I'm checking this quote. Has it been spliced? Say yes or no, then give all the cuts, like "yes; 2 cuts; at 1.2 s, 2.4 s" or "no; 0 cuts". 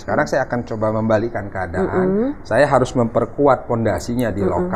no; 0 cuts